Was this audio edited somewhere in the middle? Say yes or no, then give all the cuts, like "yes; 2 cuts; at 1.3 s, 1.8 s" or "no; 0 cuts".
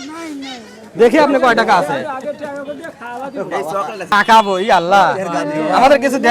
yes; 1 cut; at 4.1 s